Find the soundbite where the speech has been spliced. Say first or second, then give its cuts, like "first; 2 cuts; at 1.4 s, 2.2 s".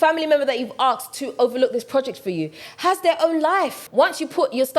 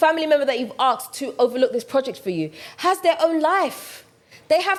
first; 1 cut; at 3.8 s